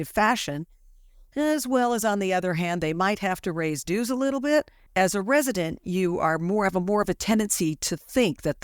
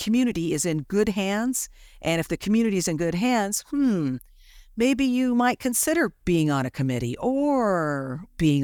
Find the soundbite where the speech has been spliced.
first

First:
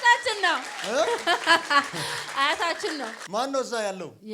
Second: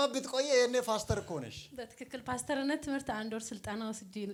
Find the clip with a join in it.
first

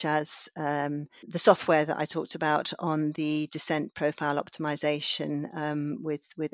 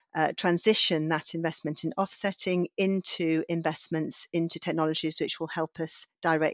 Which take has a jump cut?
first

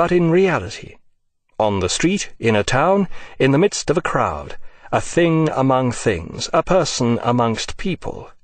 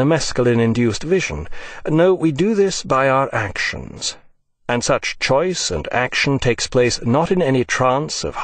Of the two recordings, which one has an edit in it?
first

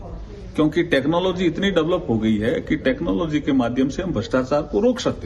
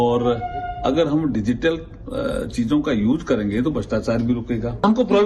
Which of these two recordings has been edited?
first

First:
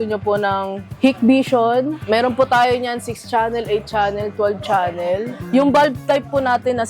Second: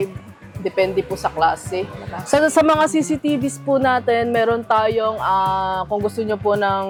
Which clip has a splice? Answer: first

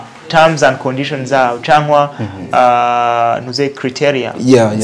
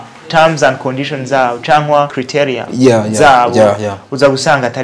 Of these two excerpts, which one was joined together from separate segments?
second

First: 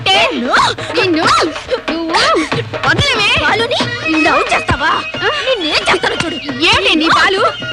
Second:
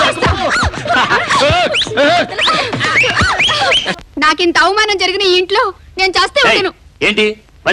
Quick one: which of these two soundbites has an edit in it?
second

